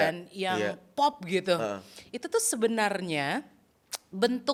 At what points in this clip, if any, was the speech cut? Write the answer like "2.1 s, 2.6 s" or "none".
none